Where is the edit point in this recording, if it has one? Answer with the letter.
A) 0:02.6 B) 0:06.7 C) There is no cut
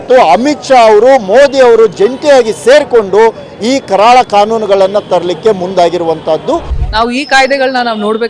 B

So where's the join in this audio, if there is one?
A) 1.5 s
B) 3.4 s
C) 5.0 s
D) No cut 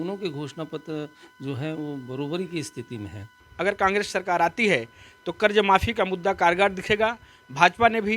B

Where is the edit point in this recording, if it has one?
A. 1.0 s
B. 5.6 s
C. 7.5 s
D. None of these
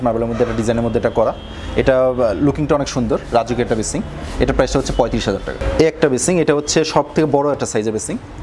B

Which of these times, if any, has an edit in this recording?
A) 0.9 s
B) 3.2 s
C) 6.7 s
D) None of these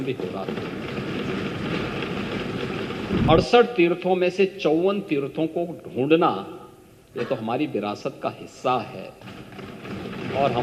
B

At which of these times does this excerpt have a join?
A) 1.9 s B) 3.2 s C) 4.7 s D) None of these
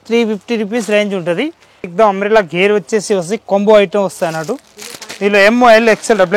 A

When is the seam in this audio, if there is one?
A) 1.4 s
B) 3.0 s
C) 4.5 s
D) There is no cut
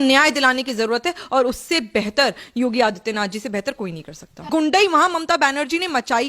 C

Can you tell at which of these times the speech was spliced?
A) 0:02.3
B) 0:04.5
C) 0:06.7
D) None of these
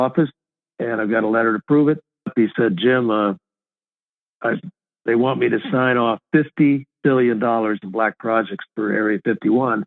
A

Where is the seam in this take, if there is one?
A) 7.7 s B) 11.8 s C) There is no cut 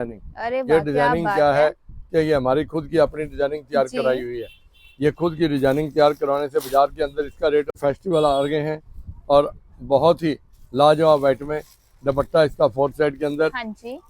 A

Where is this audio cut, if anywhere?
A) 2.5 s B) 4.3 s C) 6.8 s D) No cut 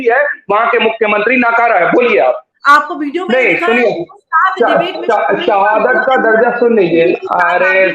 A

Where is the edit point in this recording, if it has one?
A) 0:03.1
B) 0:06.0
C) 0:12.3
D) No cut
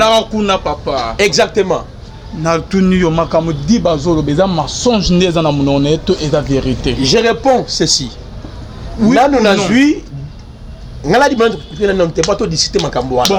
D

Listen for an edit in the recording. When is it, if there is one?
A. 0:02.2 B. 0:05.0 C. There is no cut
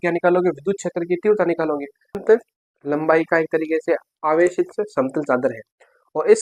A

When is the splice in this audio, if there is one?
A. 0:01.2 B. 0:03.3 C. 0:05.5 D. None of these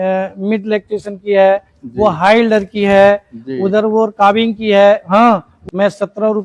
C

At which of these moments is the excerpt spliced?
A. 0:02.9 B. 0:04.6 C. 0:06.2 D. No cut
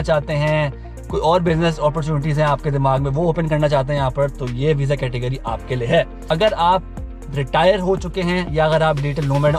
C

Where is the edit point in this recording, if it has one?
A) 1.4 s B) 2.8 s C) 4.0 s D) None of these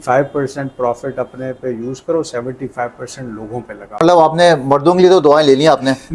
C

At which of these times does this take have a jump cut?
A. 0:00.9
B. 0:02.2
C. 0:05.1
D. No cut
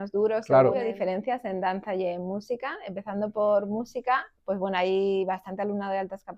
A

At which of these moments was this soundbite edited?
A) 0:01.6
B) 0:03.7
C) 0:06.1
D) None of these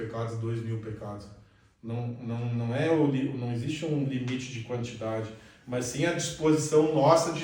D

